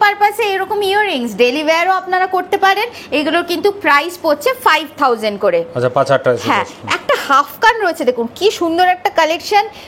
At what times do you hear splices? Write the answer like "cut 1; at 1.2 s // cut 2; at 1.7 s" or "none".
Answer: none

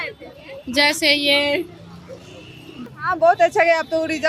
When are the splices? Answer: cut 1; at 3.0 s

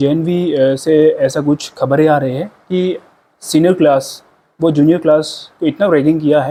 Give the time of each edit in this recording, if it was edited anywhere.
none

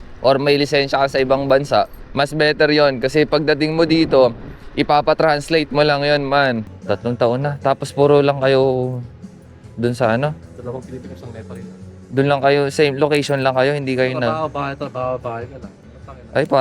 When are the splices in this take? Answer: cut 1; at 2.0 s // cut 2; at 6.7 s

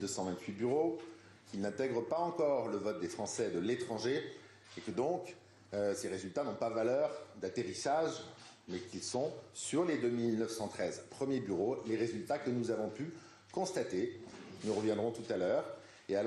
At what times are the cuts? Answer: cut 1; at 4.8 s

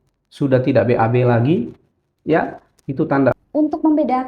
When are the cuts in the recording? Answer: cut 1; at 3.3 s

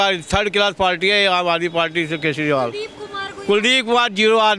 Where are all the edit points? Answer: none

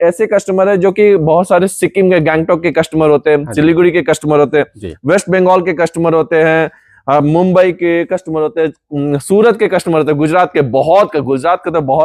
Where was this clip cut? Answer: none

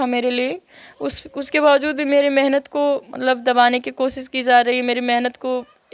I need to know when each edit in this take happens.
none

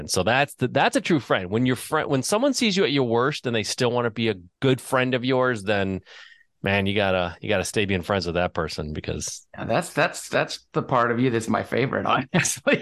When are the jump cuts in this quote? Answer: cut 1; at 4.5 s

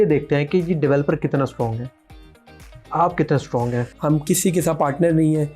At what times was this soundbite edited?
cut 1; at 3.9 s

